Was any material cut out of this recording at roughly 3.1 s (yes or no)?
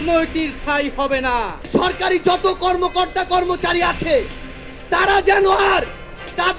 no